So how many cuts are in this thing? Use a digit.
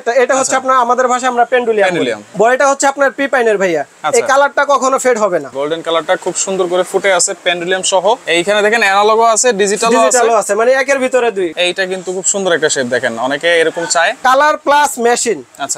5